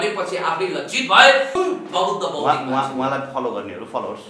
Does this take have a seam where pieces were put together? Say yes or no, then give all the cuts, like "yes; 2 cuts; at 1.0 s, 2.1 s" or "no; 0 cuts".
yes; 1 cut; at 1.5 s